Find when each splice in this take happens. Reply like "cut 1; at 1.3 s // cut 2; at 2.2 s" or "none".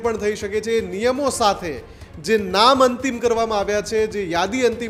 none